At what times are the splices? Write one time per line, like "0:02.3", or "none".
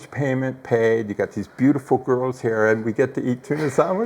none